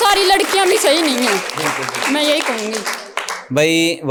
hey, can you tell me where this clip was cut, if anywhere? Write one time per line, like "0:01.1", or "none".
none